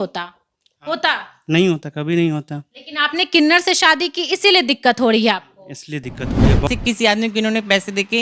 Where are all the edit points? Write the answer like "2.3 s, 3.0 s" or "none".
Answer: 6.7 s